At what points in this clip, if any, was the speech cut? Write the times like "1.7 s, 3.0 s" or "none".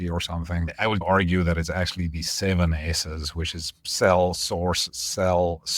1.0 s